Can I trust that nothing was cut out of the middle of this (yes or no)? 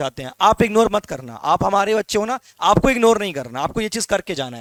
yes